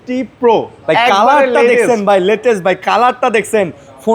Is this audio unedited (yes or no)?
yes